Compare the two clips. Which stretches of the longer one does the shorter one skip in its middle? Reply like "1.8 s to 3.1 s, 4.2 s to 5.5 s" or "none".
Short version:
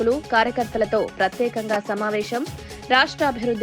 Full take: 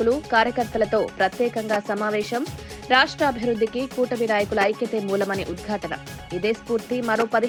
none